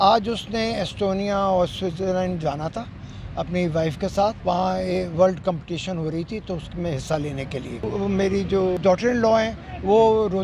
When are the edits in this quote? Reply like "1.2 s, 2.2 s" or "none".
4.4 s, 7.8 s, 8.8 s